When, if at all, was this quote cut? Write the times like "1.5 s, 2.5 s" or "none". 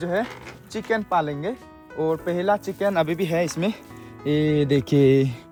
none